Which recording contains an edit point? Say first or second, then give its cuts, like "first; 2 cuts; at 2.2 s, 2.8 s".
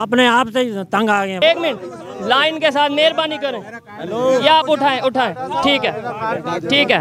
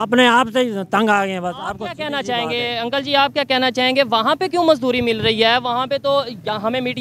first; 1 cut; at 1.4 s